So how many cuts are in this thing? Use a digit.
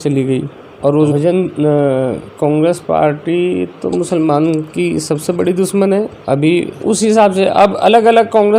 2